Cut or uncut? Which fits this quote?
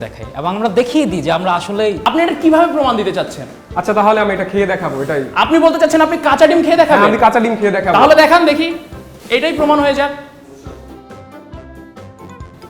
cut